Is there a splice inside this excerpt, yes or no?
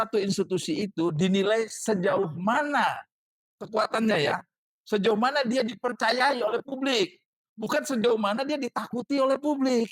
no